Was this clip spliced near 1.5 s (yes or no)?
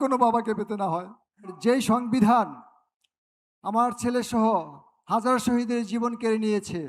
yes